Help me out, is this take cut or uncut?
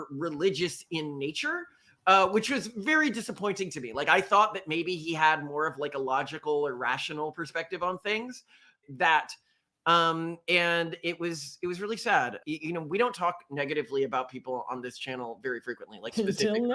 cut